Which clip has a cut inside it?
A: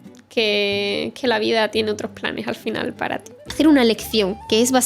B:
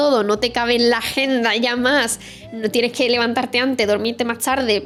A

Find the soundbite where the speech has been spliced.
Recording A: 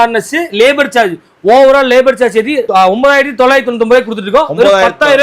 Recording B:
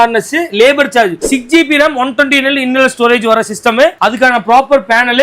B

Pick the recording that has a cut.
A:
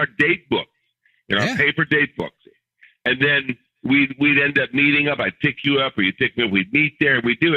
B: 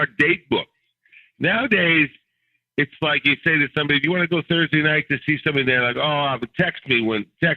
B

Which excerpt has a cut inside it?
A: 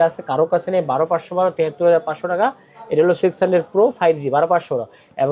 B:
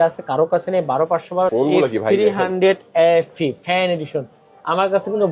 B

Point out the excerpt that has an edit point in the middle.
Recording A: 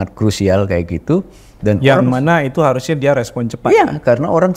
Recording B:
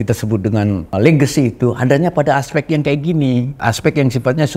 B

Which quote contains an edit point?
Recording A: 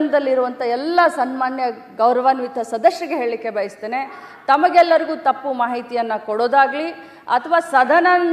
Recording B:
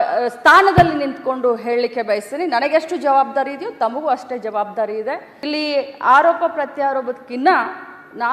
B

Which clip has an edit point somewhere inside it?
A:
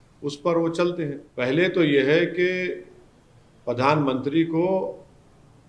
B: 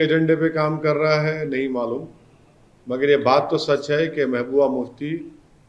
A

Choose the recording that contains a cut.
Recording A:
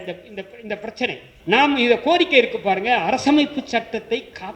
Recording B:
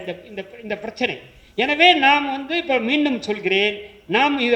A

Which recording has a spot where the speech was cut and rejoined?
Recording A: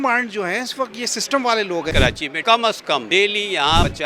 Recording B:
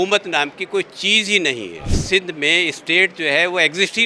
A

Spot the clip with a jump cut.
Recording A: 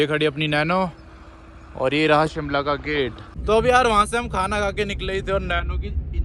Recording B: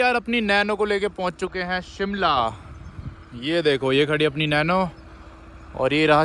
A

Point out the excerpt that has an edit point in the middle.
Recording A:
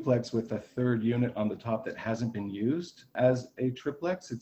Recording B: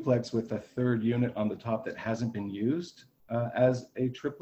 A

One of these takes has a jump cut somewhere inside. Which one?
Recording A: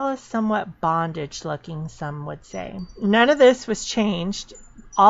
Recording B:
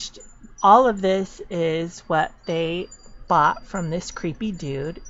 A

